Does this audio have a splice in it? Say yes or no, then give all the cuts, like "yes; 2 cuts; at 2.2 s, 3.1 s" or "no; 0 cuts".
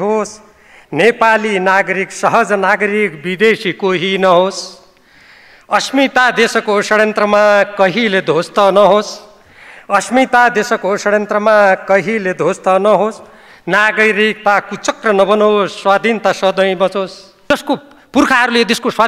yes; 1 cut; at 17.3 s